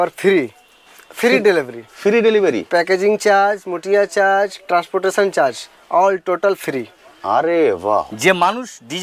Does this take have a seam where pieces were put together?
yes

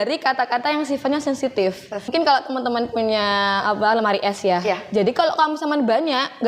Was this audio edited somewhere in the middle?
yes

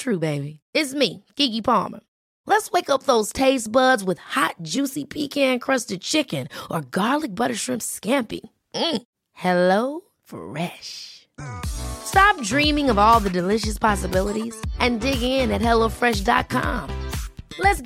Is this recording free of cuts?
yes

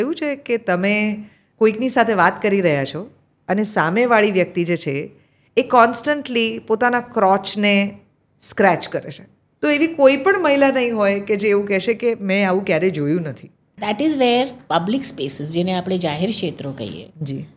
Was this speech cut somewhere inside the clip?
yes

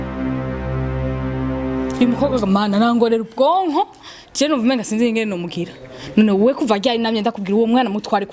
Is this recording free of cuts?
no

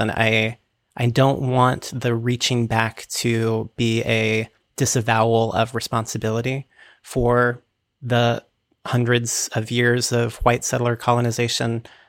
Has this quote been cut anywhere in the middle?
no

